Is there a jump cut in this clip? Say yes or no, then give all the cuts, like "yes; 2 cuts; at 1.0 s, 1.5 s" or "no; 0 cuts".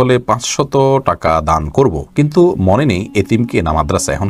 no; 0 cuts